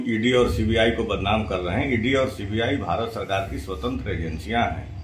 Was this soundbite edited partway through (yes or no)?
no